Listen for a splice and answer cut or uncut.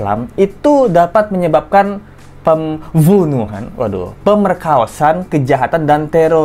uncut